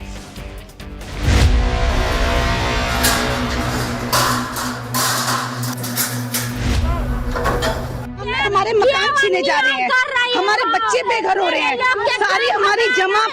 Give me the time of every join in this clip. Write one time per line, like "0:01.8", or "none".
0:01.1